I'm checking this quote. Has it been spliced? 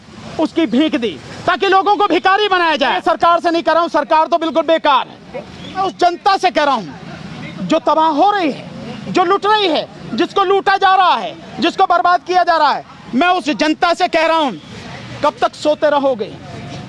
yes; 2 cuts; at 3.0 s, 5.9 s

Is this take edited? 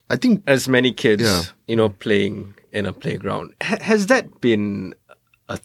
no; 0 cuts

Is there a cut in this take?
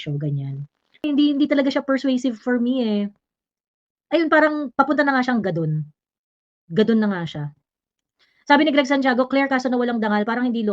yes; 1 cut; at 1.0 s

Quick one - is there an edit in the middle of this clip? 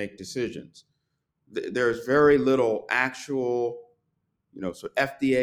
no; 0 cuts

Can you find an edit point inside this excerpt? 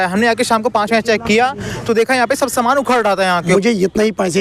yes; 1 cut; at 3.5 s

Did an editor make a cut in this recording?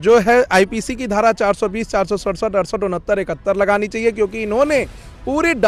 no; 0 cuts

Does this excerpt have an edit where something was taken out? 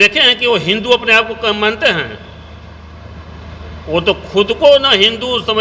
no; 0 cuts

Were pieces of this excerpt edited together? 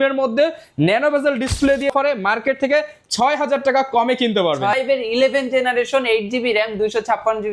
yes; 2 cuts; at 1.9 s, 4.8 s

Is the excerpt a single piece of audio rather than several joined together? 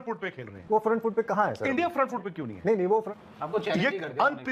no; 1 cut; at 3.1 s

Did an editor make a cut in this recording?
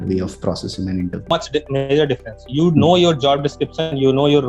yes; 1 cut; at 1.3 s

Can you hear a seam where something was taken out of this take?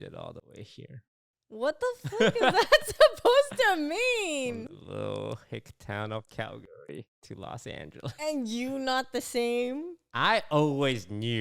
no; 0 cuts

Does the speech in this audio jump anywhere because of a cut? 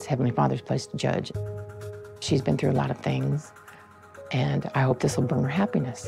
no; 0 cuts

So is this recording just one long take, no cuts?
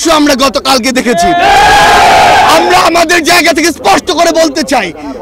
yes; 0 cuts

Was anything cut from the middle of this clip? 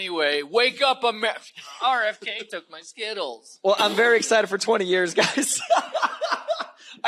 yes; 1 cut; at 1.7 s

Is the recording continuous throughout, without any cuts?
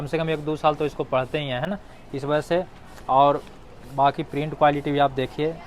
yes; 0 cuts

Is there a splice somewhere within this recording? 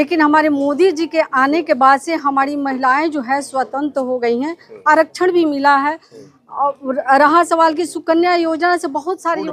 no; 0 cuts

